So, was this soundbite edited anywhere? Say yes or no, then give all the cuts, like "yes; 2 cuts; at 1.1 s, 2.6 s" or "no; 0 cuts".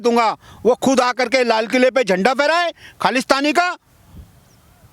no; 0 cuts